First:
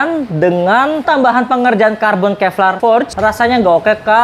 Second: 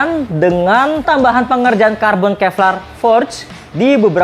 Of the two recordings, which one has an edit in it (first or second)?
first